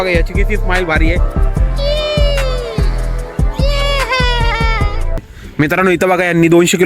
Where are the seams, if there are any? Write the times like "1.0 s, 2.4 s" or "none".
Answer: 5.3 s